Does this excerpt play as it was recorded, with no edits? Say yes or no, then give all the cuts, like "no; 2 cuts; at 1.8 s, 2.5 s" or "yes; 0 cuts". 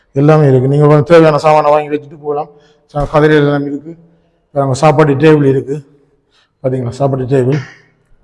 yes; 0 cuts